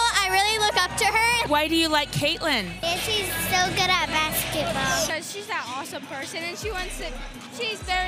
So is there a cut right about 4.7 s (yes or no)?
no